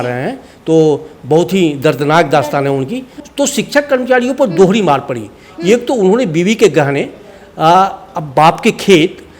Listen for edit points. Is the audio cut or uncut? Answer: cut